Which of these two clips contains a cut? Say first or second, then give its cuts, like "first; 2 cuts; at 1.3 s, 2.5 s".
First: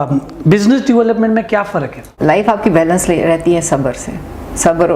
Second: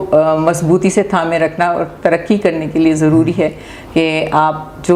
first; 1 cut; at 2.1 s